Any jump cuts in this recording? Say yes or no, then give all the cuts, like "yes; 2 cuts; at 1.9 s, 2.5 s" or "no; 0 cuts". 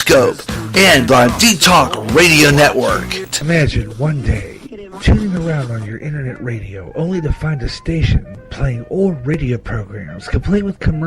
yes; 1 cut; at 3.1 s